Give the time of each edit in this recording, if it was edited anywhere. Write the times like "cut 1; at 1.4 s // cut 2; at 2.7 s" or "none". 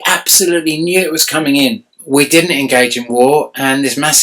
cut 1; at 1.9 s